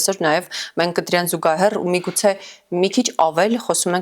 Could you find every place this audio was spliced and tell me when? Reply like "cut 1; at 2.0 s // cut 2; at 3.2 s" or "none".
none